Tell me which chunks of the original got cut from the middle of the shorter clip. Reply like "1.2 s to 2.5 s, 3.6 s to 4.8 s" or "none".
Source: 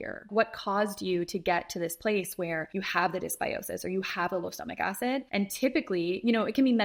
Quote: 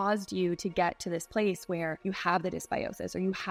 none